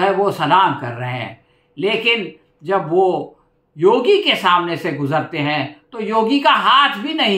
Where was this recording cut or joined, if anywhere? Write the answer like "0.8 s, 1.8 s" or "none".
none